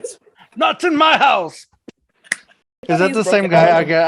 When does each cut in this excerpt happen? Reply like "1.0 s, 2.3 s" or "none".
2.9 s